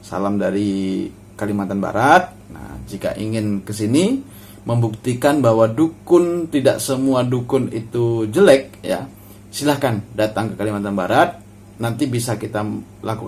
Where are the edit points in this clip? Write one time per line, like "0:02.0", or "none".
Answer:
none